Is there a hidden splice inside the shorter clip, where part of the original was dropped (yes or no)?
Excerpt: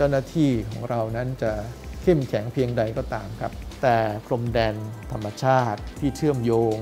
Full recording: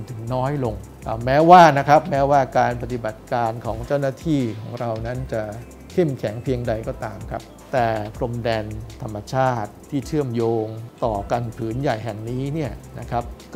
no